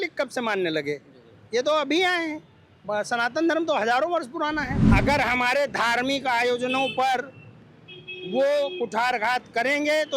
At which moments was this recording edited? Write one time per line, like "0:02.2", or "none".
0:04.8